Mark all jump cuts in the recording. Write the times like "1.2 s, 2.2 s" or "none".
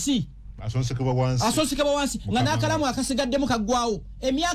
none